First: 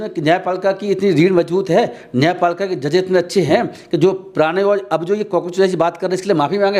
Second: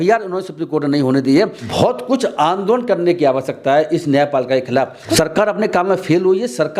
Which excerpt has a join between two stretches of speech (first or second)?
second